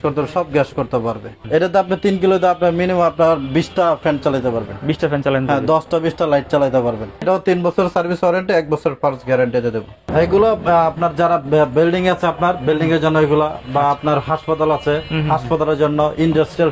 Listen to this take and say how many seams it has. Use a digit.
3